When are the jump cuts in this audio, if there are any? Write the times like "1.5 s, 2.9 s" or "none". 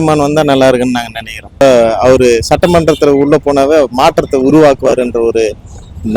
1.6 s